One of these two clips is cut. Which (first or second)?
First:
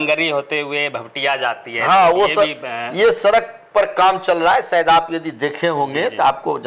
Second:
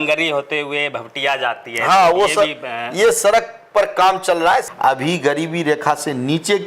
second